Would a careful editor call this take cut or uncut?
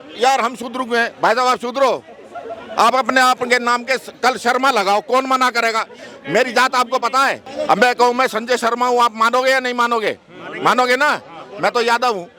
cut